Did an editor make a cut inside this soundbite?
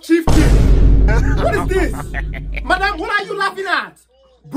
no; 0 cuts

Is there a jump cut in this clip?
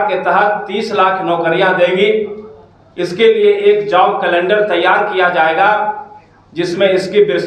no; 0 cuts

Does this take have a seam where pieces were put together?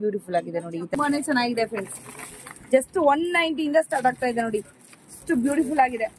yes; 1 cut; at 0.9 s

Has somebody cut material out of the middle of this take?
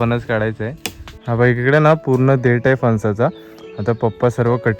yes; 1 cut; at 1.1 s

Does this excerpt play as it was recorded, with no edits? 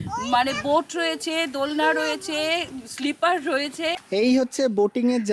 no; 1 cut; at 4.0 s

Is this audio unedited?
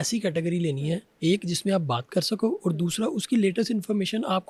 yes; 0 cuts

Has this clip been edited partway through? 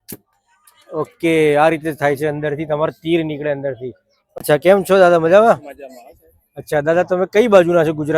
yes; 1 cut; at 4.4 s

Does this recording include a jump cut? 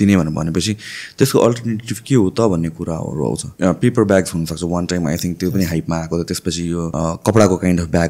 yes; 2 cuts; at 3.5 s, 6.9 s

